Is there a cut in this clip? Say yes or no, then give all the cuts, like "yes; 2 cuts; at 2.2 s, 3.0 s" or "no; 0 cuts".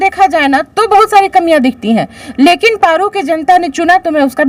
no; 0 cuts